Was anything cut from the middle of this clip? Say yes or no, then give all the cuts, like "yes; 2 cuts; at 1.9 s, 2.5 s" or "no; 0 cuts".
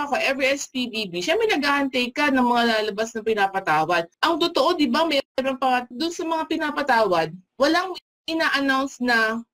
yes; 3 cuts; at 4.1 s, 5.9 s, 7.4 s